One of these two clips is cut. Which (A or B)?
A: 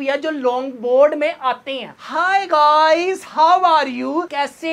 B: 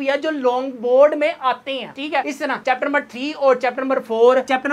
A